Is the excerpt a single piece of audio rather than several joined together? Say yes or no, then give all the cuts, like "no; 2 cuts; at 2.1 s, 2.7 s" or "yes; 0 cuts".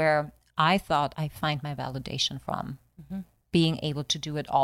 no; 1 cut; at 1.1 s